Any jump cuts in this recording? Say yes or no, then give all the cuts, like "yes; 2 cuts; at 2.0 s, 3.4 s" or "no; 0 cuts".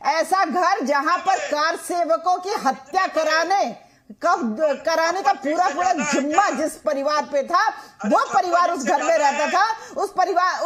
no; 0 cuts